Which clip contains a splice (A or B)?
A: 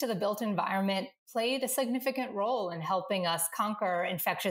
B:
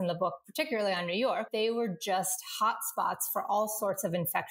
B